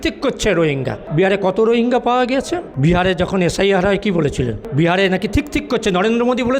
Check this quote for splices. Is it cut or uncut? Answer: cut